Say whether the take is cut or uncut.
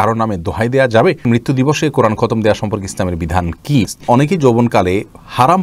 cut